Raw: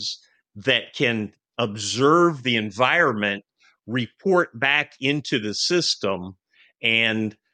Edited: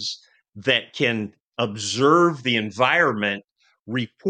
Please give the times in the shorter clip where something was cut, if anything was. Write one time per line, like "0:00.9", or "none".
none